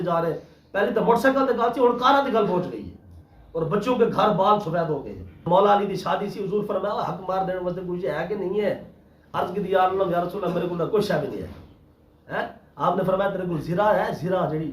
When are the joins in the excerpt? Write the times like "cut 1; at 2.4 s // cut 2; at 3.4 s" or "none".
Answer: cut 1; at 5.4 s